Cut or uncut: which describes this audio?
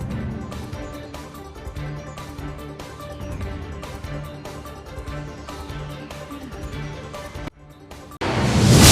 cut